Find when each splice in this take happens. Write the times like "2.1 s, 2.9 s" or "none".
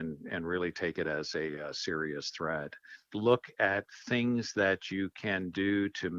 3.1 s